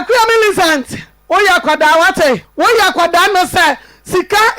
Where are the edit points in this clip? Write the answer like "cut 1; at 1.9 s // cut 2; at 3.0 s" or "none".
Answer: cut 1; at 2.5 s